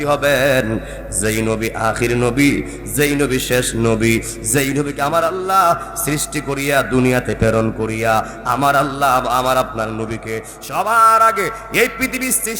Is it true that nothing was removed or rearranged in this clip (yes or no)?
yes